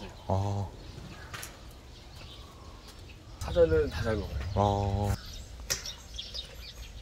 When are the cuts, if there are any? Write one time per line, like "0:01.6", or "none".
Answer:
0:03.5
0:05.2